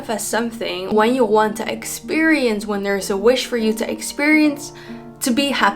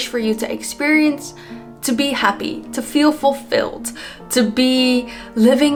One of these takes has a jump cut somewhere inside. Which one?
first; 1 cut; at 0.9 s

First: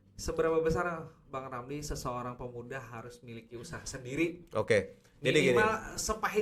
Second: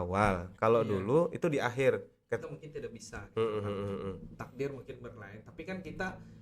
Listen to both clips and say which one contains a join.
second; 1 cut; at 2.4 s

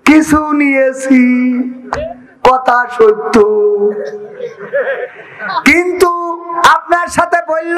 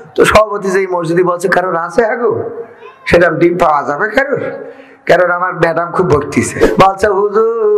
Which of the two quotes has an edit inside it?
second; 1 cut; at 6.6 s

